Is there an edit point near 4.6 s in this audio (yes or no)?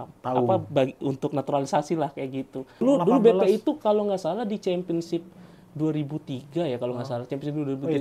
no